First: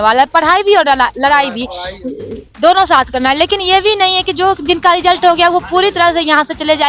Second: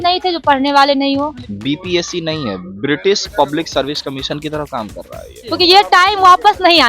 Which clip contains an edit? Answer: second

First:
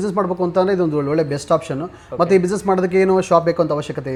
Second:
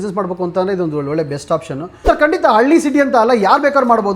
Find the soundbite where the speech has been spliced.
second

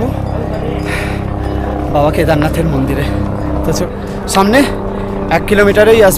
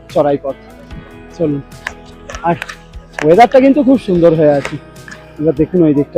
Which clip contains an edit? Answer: first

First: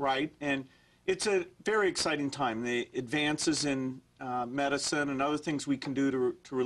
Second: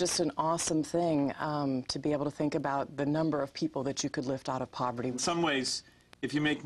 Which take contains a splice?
second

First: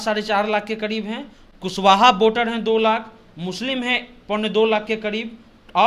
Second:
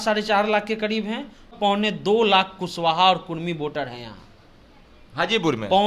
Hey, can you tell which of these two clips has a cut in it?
second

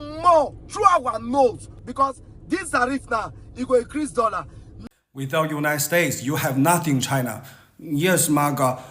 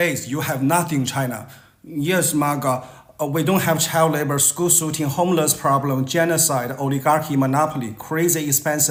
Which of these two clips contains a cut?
first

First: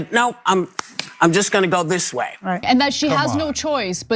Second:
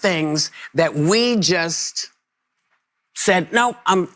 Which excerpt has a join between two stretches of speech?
first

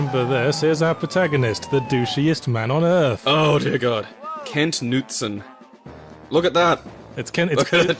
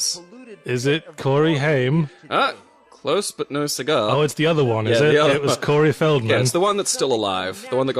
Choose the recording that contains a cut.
first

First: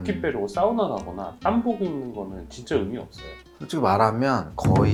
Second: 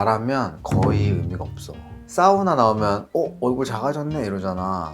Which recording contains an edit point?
second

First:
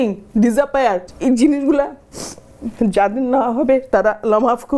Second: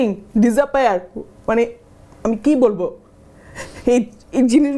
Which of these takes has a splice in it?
first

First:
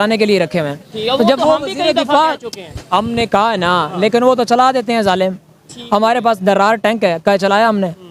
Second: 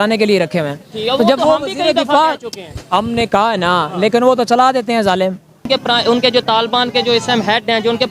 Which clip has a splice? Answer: second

